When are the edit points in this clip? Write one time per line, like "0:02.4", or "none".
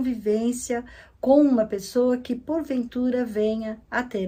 none